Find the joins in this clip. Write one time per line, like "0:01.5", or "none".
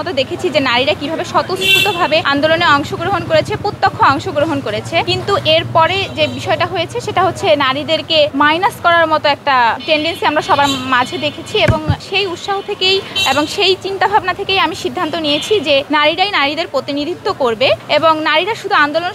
0:02.3
0:05.1
0:08.3
0:09.8
0:12.0
0:13.1
0:15.9
0:17.8